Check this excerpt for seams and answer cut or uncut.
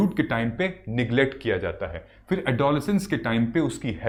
uncut